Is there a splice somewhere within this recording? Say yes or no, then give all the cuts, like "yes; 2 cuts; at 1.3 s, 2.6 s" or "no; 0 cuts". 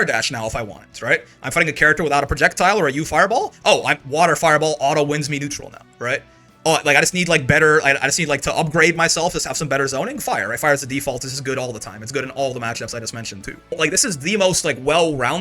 yes; 1 cut; at 13.7 s